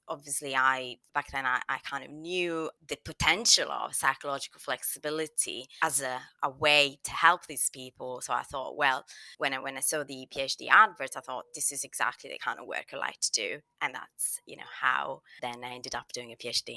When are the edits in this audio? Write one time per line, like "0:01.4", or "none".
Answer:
0:15.3